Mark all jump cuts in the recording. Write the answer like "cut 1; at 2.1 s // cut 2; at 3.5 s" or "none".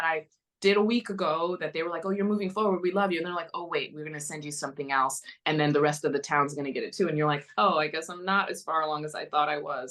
none